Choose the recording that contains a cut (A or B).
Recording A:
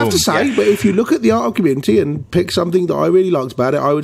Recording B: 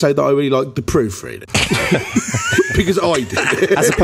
B